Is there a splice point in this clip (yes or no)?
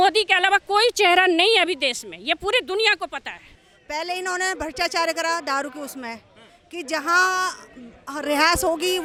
no